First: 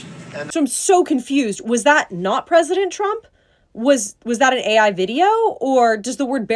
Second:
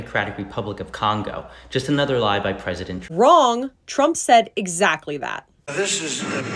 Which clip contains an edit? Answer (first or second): second